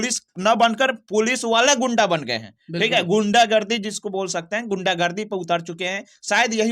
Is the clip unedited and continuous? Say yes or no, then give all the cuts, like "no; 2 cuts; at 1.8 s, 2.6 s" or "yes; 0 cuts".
yes; 0 cuts